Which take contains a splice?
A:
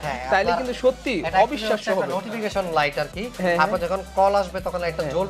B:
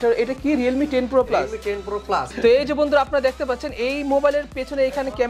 B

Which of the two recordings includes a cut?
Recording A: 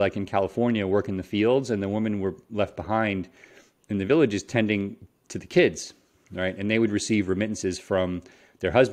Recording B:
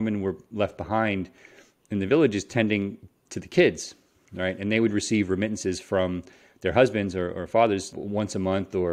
B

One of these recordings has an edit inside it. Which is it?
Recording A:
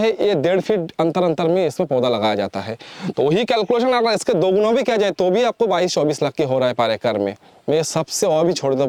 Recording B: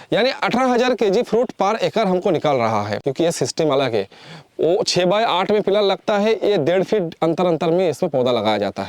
B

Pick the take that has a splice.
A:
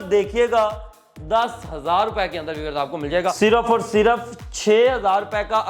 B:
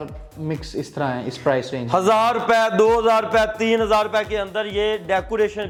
A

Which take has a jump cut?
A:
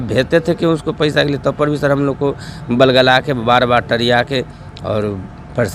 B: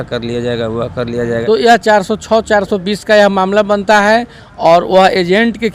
B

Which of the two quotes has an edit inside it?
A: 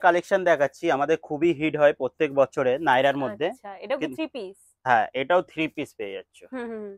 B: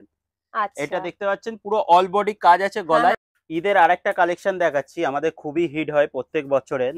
B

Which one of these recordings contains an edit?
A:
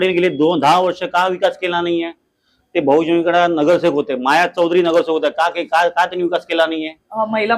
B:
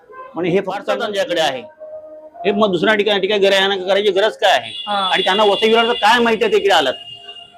B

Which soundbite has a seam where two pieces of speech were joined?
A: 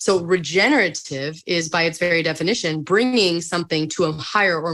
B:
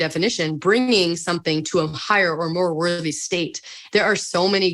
B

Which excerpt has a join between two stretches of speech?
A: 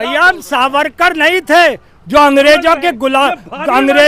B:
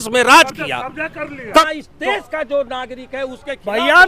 B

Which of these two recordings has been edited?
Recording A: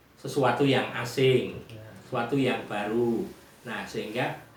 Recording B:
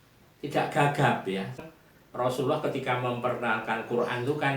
B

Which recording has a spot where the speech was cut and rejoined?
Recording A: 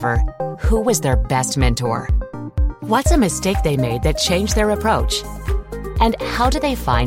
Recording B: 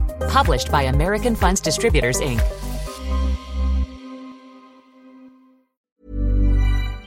B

